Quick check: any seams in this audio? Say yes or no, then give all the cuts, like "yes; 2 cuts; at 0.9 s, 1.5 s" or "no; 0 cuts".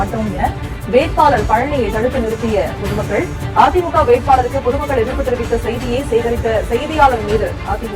no; 0 cuts